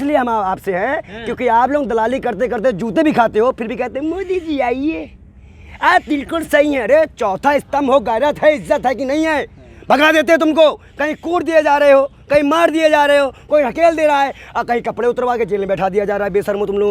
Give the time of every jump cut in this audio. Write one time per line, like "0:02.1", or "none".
none